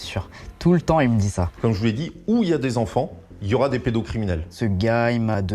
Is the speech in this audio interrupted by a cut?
yes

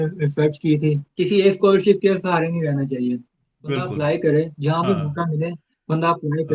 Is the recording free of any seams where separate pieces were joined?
no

